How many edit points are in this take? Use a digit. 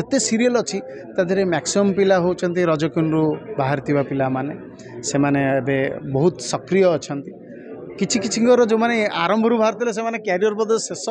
0